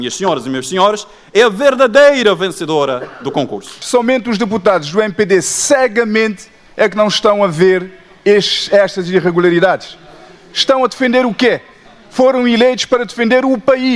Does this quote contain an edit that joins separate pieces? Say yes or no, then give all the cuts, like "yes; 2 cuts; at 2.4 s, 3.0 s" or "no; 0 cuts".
yes; 1 cut; at 3.8 s